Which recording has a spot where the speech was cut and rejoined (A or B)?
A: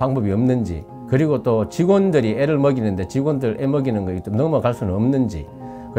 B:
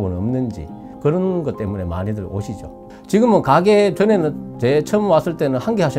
B